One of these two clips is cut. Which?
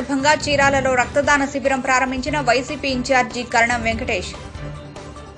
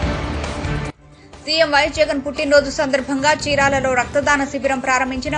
second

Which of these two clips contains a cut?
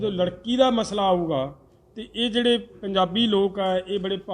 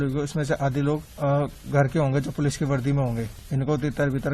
second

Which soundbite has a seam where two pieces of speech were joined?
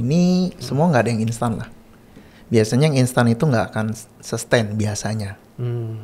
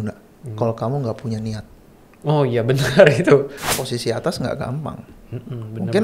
second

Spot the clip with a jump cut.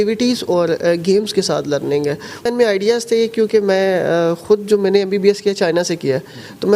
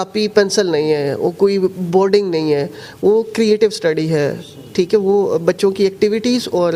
first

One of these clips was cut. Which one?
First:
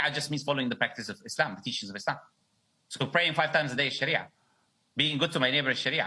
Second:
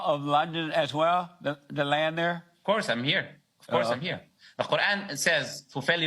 first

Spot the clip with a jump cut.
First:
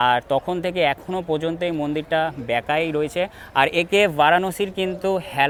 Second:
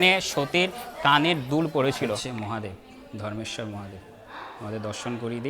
second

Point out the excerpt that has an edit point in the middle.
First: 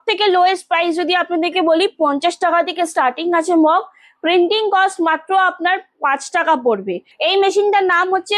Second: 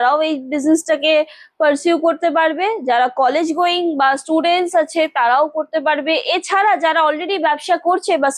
first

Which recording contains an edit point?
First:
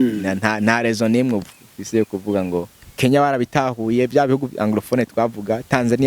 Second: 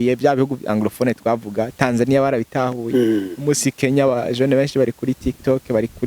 first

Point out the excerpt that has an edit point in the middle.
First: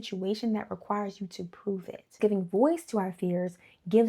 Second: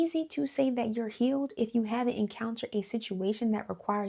first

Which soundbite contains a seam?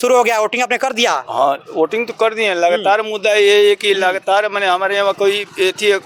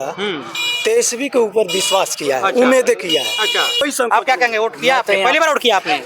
second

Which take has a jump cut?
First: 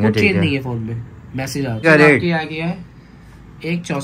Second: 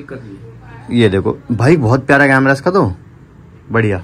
first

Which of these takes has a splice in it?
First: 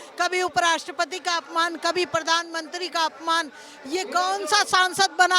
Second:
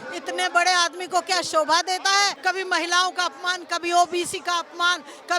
second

